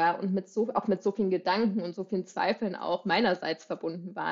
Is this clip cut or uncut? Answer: uncut